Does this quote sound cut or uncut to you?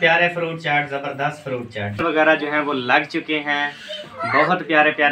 cut